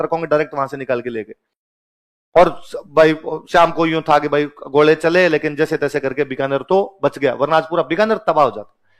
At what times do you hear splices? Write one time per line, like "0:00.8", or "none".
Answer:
none